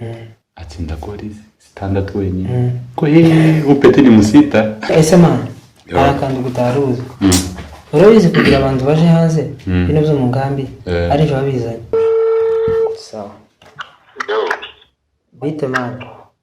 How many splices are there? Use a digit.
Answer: 2